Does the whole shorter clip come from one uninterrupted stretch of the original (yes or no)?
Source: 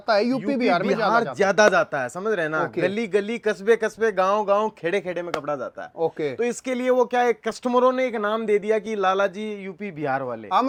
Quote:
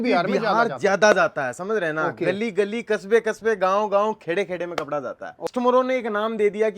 no